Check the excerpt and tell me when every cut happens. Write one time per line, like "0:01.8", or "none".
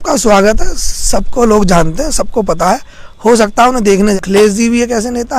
0:04.2

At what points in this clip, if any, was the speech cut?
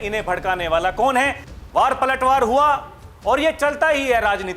0:01.4

